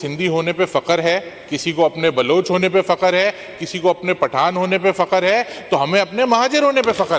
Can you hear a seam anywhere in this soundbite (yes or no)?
no